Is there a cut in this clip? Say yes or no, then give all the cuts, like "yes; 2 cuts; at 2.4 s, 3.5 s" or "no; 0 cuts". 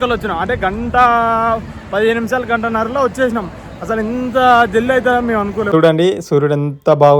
yes; 1 cut; at 5.7 s